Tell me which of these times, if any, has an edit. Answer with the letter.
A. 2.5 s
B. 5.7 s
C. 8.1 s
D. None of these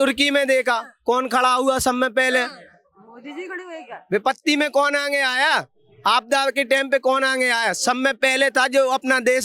D